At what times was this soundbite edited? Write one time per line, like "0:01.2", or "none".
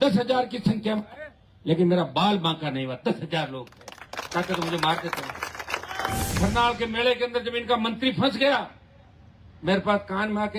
0:06.2